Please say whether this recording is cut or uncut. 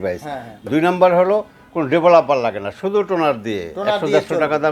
uncut